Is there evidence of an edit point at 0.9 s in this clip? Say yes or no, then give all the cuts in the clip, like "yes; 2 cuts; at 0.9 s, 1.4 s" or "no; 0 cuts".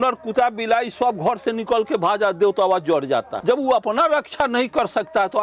no; 1 cut; at 3.3 s